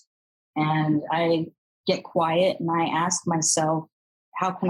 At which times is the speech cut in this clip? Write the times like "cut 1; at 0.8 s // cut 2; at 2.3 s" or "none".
none